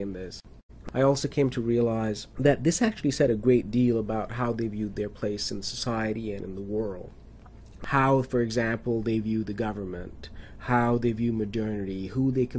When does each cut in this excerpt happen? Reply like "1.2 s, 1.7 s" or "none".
9.5 s